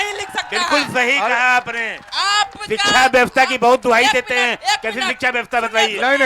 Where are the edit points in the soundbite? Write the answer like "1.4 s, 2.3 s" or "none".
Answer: none